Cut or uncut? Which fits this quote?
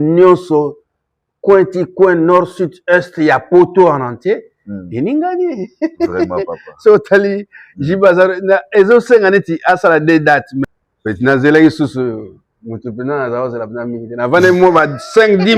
cut